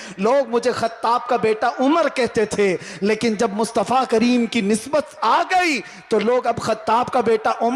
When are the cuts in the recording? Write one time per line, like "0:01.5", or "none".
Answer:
none